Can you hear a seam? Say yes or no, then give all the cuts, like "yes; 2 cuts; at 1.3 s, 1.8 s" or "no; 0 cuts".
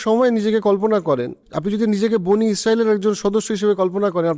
yes; 1 cut; at 1.4 s